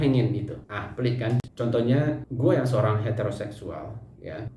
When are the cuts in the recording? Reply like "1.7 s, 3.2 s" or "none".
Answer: 1.5 s